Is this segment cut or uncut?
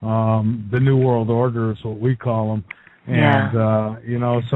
uncut